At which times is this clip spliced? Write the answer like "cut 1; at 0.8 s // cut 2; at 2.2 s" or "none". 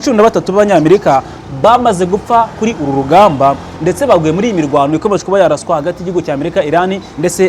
none